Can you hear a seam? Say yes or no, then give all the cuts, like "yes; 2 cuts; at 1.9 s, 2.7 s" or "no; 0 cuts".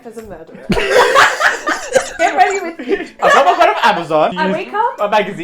yes; 3 cuts; at 2.1 s, 3.2 s, 4.3 s